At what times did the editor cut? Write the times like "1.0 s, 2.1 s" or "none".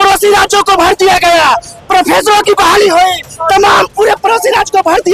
none